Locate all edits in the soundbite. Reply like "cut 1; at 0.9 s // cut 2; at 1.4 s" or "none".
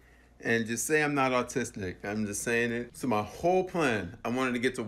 cut 1; at 2.9 s